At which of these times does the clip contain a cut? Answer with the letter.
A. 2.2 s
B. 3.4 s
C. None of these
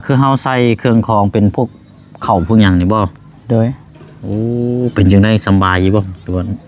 C